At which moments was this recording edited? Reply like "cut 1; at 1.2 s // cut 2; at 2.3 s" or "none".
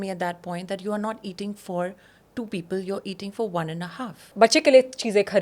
cut 1; at 4.2 s